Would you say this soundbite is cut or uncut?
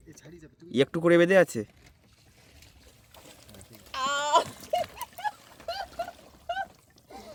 uncut